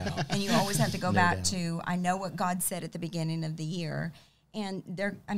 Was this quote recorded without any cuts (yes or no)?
yes